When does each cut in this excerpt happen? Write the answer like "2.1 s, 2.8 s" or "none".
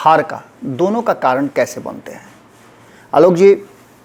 none